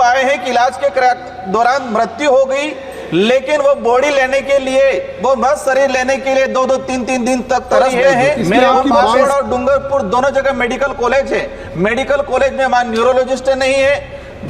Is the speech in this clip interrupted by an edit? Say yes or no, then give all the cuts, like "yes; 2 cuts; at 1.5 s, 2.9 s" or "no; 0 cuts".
yes; 1 cut; at 9.2 s